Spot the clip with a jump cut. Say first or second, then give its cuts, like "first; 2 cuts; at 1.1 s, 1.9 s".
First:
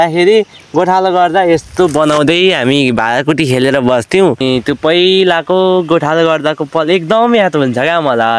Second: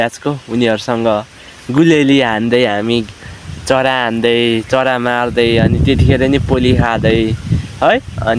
first; 1 cut; at 4.4 s